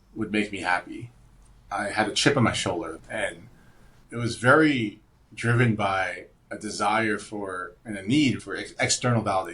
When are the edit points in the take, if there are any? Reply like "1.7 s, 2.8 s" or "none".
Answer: 1.6 s, 2.9 s, 8.4 s